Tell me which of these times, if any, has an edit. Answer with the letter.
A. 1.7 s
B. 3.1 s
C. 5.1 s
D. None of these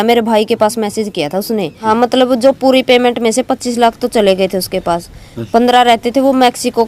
A